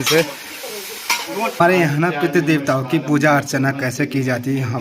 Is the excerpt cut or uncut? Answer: cut